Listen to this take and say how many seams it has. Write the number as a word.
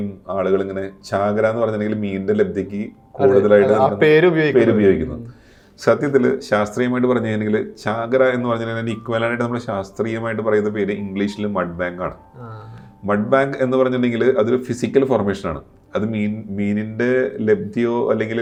zero